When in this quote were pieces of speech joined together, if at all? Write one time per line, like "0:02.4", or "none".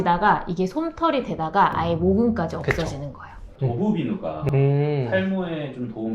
0:03.4